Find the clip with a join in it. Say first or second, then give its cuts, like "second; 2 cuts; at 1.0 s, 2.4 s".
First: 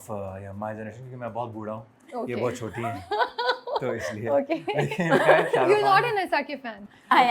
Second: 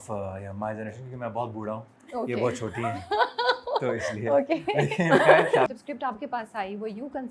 second; 1 cut; at 5.7 s